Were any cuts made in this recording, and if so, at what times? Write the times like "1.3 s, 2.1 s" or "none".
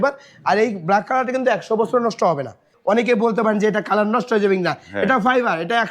2.7 s